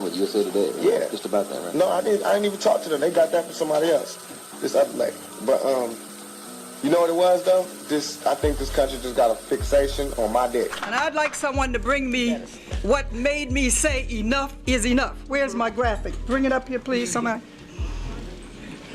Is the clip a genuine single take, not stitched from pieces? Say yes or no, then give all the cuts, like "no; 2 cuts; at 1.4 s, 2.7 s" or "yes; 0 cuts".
no; 1 cut; at 10.9 s